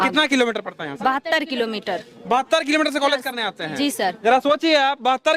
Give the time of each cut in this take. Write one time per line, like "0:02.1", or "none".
none